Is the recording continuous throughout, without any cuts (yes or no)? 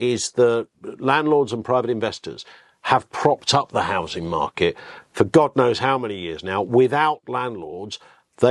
yes